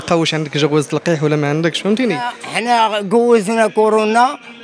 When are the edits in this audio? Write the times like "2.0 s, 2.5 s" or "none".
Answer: 2.3 s